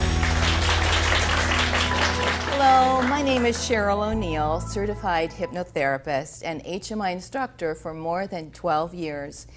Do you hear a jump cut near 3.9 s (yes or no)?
yes